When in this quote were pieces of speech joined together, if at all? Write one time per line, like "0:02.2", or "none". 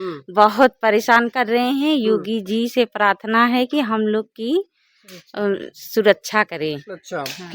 none